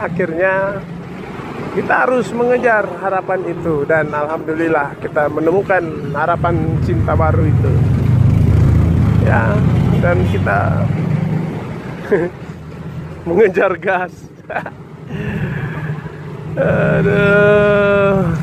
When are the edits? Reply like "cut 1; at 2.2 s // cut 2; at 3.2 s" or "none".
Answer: none